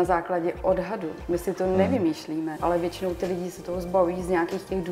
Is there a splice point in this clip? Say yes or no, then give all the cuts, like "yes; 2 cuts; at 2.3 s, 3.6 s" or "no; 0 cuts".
yes; 1 cut; at 2.6 s